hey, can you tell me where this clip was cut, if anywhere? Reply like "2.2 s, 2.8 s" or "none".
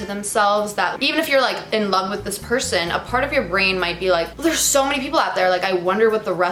none